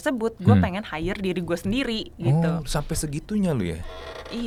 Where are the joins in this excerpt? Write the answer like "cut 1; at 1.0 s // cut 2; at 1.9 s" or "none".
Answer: none